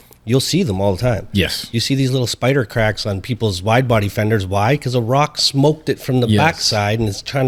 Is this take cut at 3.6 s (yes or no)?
no